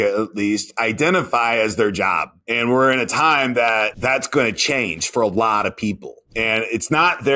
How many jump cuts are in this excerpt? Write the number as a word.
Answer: zero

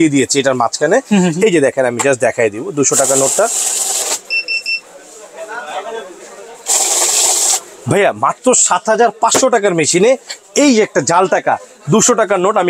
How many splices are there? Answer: zero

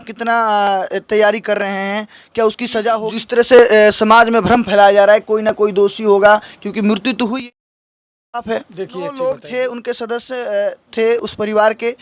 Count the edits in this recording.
two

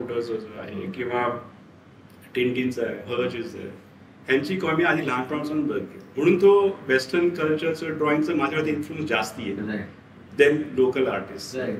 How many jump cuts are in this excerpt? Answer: zero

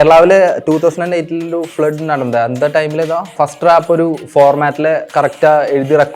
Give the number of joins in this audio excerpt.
two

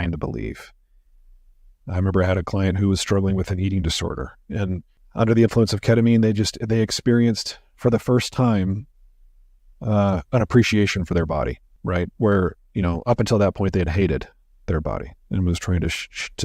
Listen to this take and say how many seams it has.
two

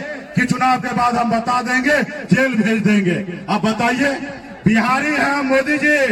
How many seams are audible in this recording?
zero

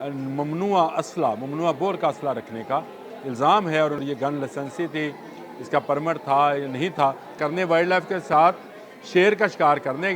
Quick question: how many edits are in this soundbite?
two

